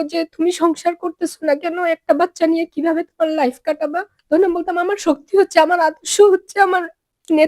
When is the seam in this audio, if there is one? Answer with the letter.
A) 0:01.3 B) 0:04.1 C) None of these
B